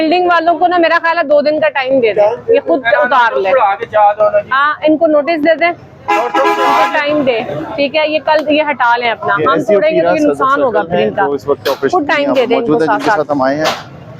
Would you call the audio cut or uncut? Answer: uncut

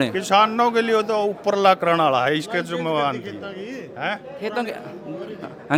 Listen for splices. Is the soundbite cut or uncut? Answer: uncut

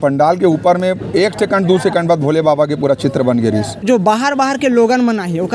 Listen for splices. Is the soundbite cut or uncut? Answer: cut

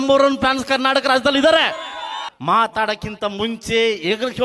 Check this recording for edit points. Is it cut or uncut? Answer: cut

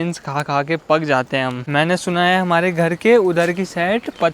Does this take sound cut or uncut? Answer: cut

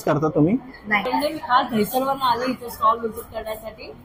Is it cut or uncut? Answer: cut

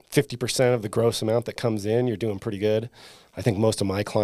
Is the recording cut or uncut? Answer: uncut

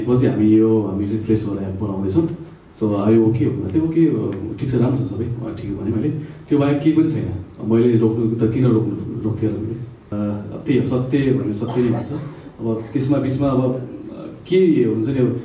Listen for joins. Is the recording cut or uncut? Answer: cut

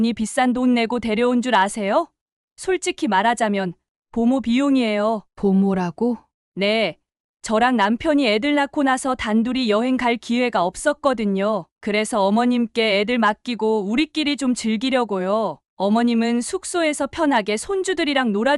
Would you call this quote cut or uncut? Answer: uncut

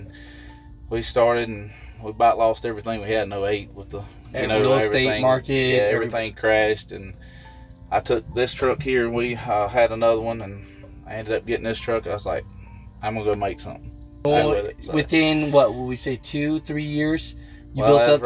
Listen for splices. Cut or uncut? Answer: cut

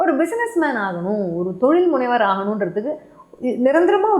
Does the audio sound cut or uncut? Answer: uncut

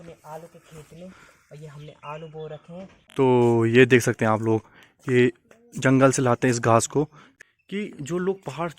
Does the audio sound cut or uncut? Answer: cut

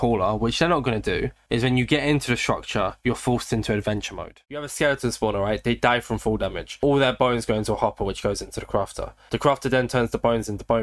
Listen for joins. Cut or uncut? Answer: cut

